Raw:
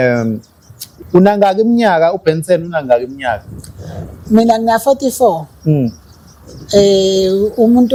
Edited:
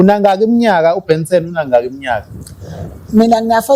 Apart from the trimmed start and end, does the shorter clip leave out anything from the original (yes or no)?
no